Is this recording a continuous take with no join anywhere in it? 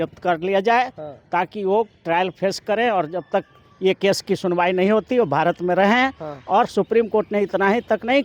yes; 0 cuts

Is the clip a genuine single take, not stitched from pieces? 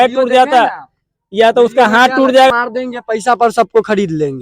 no; 1 cut; at 2.5 s

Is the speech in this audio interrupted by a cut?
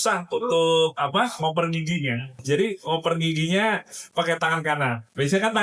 yes; 1 cut; at 2.4 s

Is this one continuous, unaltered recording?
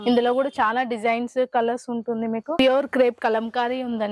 no; 1 cut; at 2.6 s

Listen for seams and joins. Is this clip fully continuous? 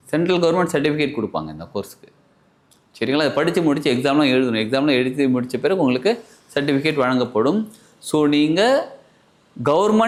yes; 0 cuts

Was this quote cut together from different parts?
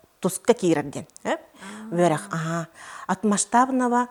no; 0 cuts

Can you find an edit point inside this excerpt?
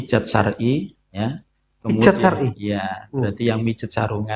no; 0 cuts

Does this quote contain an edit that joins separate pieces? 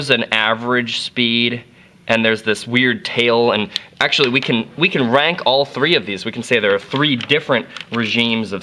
yes; 1 cut; at 1.6 s

